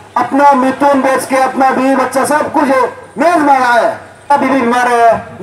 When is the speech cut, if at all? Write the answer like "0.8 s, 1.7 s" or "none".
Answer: 4.3 s